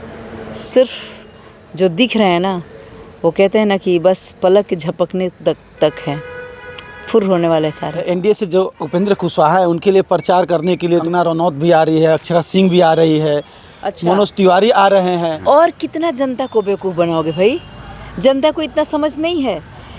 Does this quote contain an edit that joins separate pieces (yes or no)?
no